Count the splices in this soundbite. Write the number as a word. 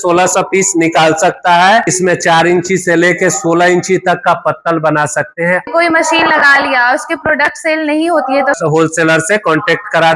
three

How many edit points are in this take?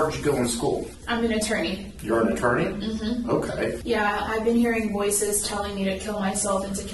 two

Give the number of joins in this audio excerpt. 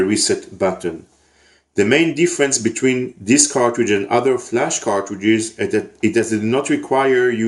zero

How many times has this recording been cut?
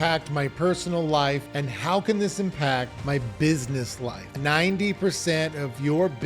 three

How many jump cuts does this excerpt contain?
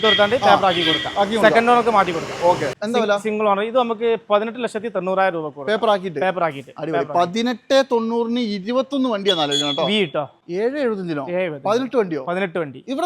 two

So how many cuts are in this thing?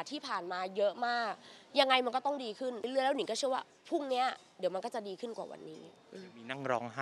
one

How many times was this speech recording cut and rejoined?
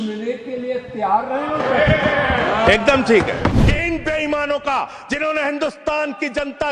one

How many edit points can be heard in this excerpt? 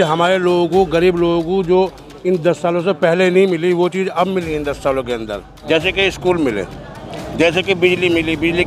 one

